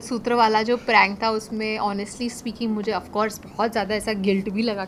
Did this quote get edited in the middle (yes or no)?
no